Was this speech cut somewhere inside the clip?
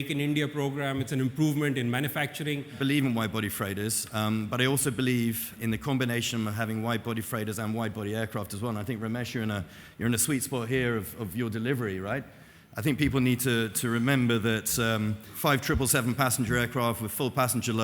yes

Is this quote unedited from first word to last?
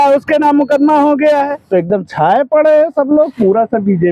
no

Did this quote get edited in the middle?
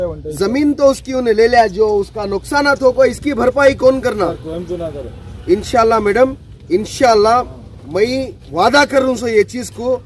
no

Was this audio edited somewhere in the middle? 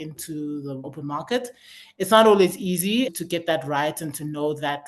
yes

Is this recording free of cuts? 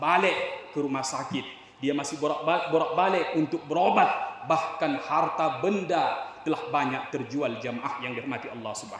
yes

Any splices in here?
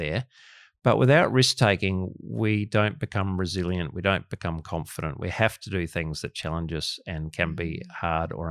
no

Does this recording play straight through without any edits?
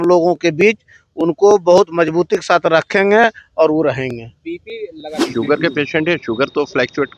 no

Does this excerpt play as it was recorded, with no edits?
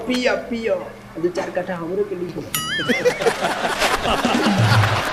yes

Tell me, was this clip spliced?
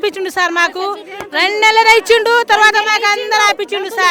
no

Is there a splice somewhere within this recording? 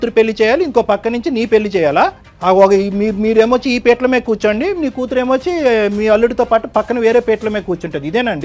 yes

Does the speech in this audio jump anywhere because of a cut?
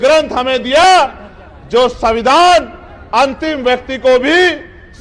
no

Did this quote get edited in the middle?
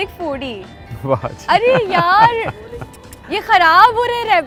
no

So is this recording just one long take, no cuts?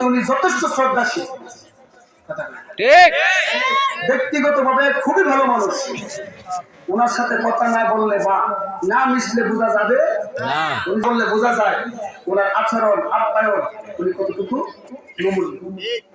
no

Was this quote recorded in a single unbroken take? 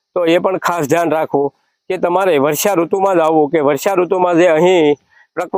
yes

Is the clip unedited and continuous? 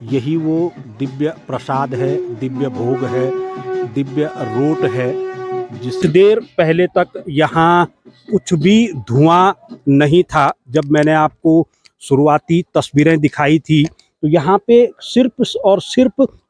no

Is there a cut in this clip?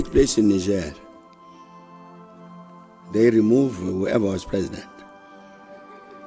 no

